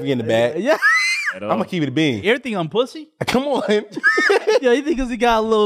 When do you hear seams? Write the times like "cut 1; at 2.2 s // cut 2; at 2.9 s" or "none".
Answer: cut 1; at 2.2 s // cut 2; at 4.6 s